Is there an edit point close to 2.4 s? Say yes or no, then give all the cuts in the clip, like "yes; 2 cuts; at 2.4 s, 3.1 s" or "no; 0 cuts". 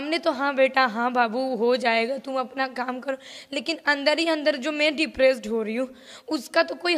no; 0 cuts